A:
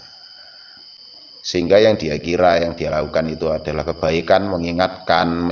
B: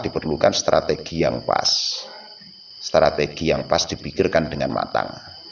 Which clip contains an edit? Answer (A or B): A